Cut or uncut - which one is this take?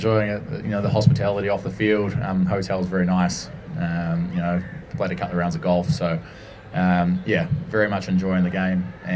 uncut